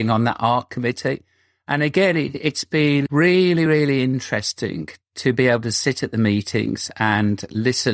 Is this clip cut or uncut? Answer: uncut